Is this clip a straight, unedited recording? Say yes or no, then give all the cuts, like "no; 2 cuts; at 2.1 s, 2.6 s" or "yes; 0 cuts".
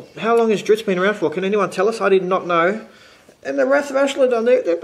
yes; 0 cuts